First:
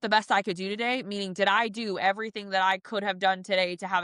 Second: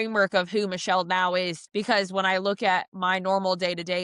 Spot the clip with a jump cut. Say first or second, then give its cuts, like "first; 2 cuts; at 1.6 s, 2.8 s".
second; 1 cut; at 1.6 s